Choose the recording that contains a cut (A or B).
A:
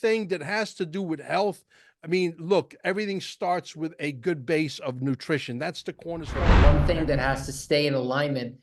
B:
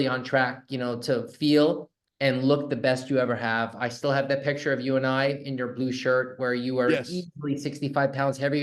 A